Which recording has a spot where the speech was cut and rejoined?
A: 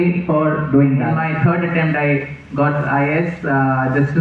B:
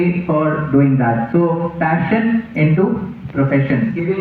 A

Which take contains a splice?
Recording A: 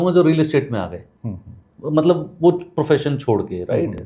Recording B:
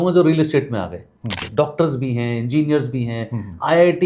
B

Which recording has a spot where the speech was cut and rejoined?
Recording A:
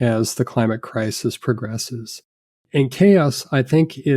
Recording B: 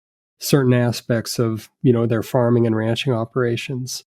A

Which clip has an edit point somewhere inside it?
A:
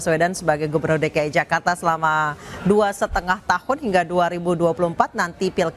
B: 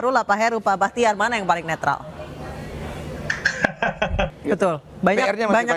B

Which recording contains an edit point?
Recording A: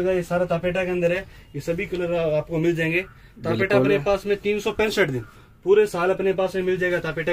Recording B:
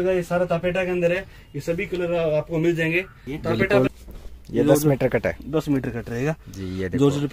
B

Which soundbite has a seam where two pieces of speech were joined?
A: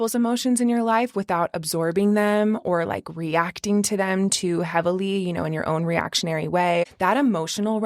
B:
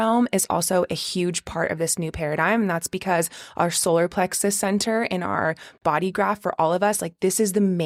A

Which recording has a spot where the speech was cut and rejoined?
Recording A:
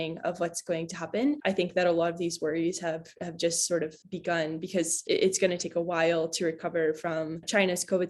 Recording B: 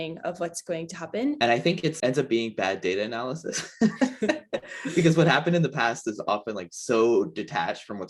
B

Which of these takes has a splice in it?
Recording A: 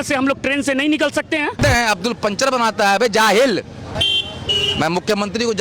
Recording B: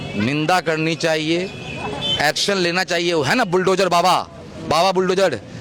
A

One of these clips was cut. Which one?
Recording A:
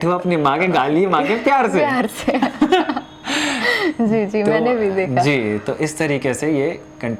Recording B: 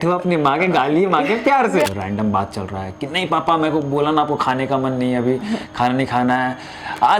B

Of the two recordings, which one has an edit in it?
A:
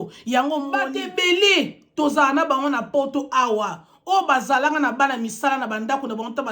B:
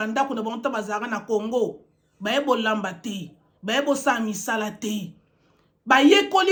A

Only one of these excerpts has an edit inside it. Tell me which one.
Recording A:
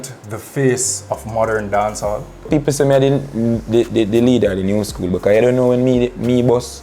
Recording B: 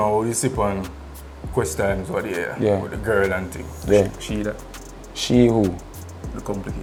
A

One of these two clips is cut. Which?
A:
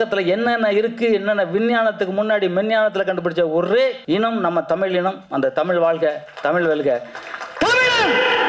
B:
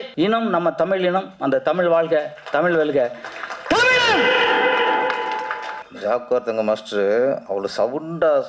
B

